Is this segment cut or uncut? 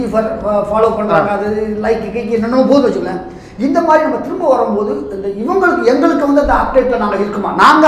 uncut